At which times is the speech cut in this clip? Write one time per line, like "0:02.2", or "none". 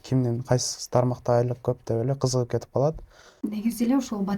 0:03.2